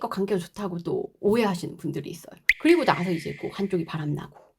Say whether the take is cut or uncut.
cut